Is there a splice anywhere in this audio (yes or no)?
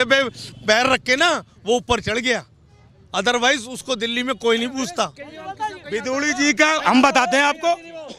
no